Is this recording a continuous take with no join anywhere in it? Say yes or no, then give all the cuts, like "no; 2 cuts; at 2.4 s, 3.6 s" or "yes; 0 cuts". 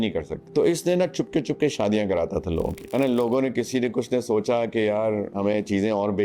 no; 1 cut; at 2.8 s